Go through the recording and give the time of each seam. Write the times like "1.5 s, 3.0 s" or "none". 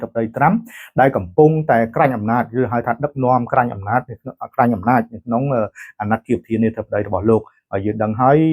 none